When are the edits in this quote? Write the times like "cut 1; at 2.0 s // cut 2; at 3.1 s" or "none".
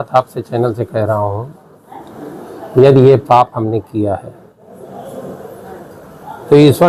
none